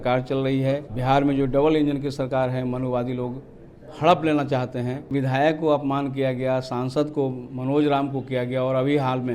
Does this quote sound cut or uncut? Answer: cut